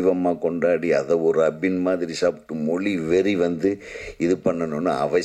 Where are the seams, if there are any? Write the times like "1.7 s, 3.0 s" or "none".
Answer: none